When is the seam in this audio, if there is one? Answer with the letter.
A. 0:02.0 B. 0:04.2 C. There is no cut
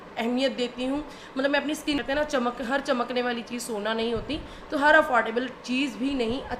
A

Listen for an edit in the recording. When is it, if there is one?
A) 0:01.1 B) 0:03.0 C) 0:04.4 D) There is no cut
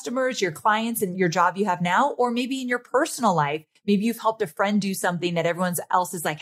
A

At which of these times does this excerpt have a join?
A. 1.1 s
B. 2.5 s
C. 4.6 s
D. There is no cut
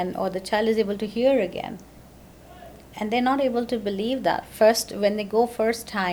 D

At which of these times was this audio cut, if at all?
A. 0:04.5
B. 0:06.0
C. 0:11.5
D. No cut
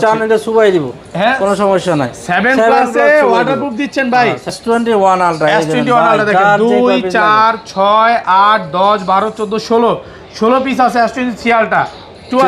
A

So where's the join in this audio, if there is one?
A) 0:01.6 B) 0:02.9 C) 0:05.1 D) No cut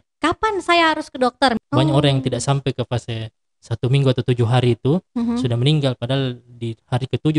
A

